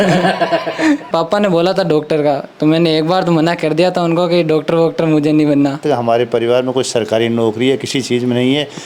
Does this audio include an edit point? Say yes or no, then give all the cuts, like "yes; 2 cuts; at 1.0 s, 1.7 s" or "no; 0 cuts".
yes; 2 cuts; at 1.1 s, 5.8 s